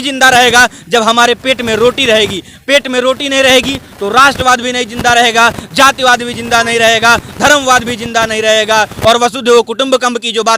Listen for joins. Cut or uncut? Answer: uncut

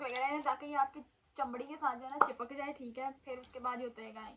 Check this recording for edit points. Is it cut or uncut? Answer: uncut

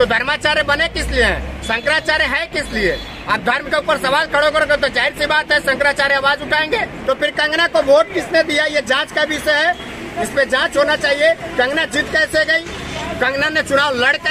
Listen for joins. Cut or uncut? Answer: cut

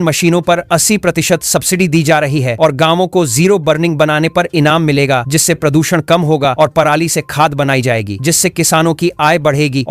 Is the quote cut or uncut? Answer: uncut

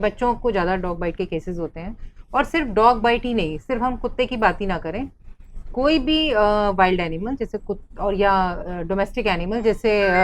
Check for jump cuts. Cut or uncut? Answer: uncut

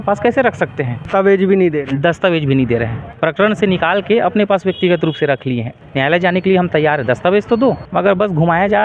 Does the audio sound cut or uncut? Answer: cut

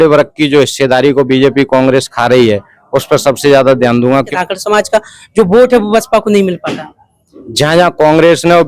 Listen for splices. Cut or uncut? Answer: cut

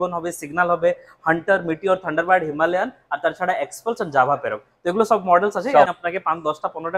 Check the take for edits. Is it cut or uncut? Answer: cut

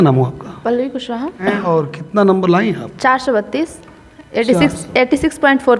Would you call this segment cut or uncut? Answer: cut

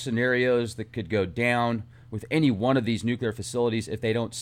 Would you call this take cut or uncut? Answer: cut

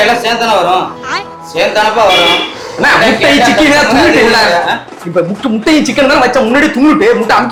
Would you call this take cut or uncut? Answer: uncut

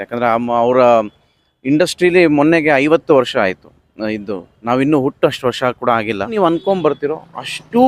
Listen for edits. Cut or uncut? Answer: cut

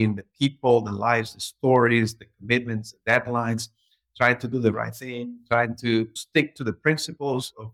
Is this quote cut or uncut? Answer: uncut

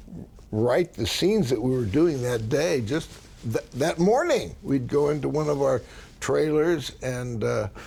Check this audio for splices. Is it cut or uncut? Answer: uncut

